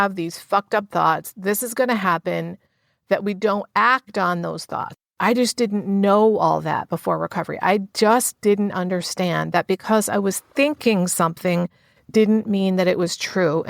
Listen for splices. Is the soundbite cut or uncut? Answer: cut